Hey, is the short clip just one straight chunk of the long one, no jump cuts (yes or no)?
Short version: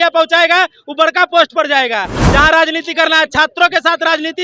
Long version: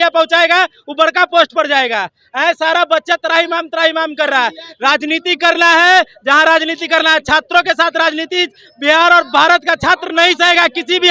no